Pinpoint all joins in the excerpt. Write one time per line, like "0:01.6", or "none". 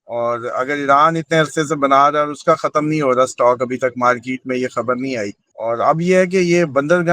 0:05.4